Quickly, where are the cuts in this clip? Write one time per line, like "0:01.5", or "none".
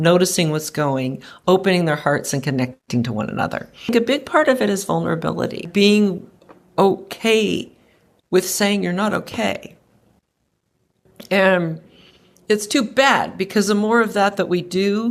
0:03.9
0:05.7